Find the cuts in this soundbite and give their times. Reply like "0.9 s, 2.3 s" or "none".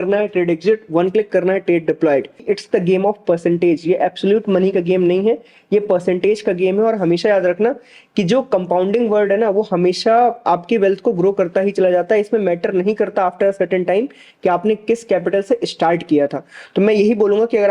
2.6 s